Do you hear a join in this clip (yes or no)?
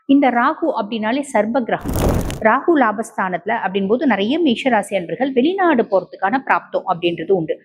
yes